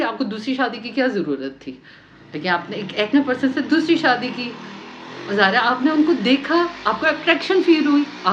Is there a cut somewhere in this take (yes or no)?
no